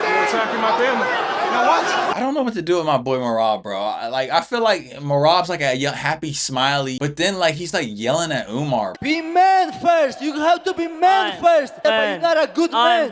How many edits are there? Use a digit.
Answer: 2